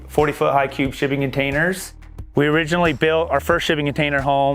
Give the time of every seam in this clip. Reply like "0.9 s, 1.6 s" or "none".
2.0 s